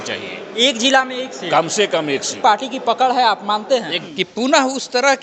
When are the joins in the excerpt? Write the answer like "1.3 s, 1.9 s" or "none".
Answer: 2.3 s, 4.0 s